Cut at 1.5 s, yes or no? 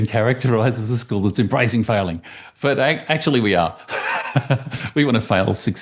no